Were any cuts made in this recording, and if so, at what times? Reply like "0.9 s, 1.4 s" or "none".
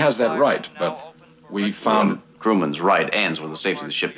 1.1 s